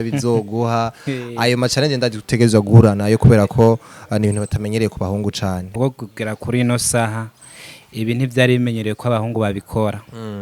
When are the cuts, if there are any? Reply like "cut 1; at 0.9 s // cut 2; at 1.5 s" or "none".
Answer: cut 1; at 5.7 s